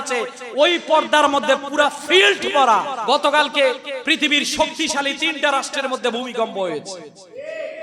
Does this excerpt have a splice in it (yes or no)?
yes